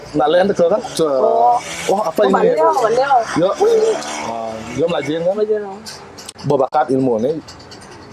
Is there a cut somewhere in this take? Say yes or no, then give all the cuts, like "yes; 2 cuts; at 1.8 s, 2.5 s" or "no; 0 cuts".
no; 0 cuts